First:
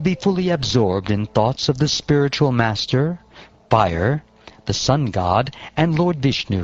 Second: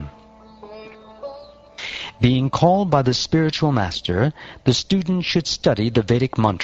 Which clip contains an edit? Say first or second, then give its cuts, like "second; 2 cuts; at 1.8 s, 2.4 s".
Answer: first; 1 cut; at 2.8 s